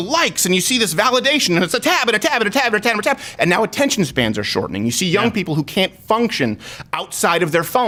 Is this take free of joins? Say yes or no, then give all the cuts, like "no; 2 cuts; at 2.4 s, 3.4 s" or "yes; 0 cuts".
yes; 0 cuts